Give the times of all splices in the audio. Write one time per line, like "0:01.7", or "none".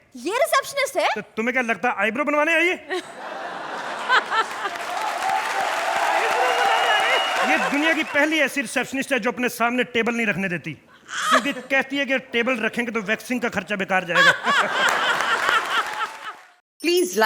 0:16.1